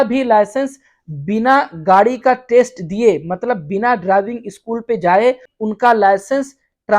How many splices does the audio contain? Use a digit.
1